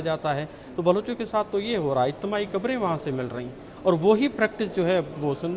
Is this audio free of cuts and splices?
yes; 0 cuts

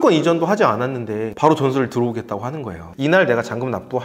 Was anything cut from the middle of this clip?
yes; 1 cut; at 2.8 s

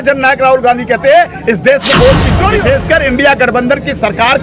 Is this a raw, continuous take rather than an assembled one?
no; 1 cut; at 2.5 s

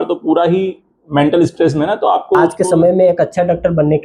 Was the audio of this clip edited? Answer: yes; 1 cut; at 2.5 s

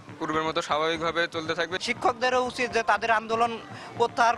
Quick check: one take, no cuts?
no; 1 cut; at 1.8 s

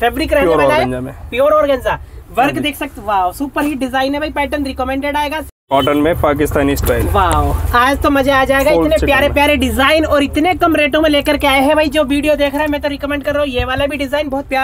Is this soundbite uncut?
no; 1 cut; at 5.5 s

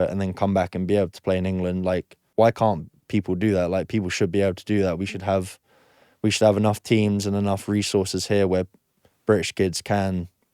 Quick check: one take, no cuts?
no; 1 cut; at 2.2 s

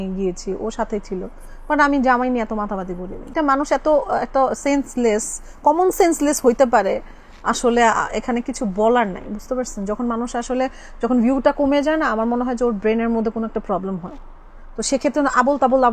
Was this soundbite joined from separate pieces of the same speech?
yes; 1 cut; at 3.2 s

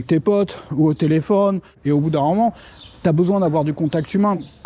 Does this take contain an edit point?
yes; 1 cut; at 1.7 s

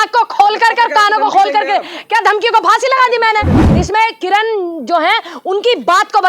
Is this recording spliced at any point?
yes; 1 cut; at 3.6 s

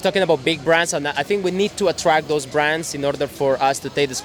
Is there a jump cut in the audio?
no; 0 cuts

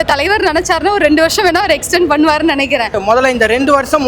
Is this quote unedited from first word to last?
no; 1 cut; at 2.9 s

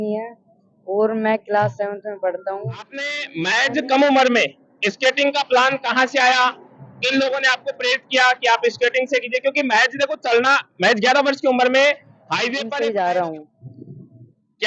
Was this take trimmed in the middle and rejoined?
yes; 2 cuts; at 3.3 s, 12.6 s

